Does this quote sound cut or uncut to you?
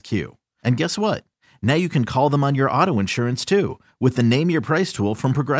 uncut